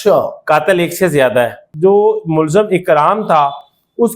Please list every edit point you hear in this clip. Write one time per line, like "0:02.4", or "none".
0:01.6

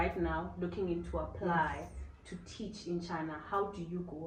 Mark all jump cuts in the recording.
none

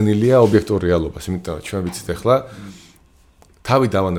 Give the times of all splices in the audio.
none

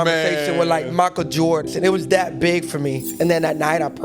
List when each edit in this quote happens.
0:01.6
0:03.0

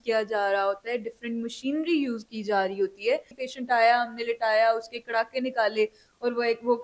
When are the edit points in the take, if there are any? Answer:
0:03.4

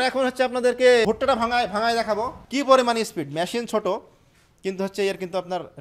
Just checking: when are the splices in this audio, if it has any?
0:01.0
0:02.4

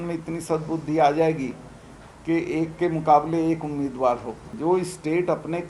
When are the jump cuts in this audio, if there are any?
0:04.5

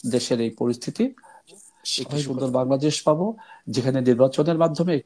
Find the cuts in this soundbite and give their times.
0:02.1

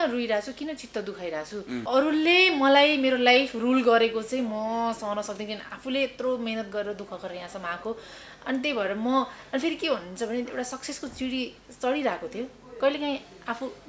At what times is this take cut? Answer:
0:01.8

